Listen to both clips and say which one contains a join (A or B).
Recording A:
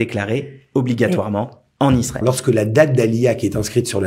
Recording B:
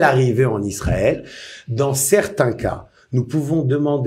A